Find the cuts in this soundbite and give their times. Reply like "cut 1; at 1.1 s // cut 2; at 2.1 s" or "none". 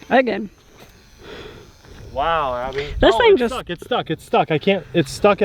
none